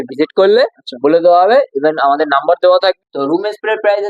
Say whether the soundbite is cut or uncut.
cut